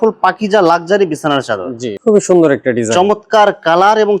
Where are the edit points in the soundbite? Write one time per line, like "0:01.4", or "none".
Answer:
0:01.9